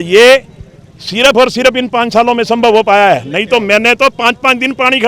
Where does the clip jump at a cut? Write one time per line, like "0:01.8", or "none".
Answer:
none